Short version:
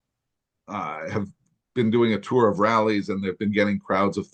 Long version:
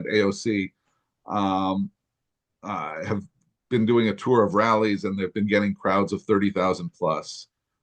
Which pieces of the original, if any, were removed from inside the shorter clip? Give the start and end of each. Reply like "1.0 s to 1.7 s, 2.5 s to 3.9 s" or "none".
none